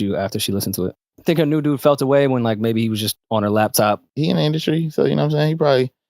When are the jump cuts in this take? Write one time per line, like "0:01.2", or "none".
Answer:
0:01.1
0:04.1

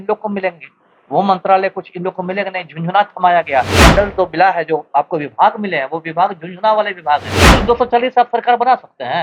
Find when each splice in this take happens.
0:03.8
0:07.4

